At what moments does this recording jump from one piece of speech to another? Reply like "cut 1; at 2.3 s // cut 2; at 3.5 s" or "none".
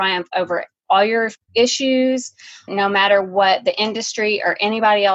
cut 1; at 1.0 s // cut 2; at 2.7 s